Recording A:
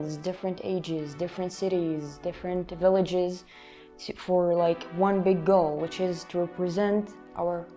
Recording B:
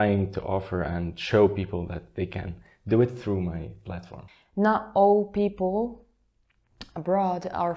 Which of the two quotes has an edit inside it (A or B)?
B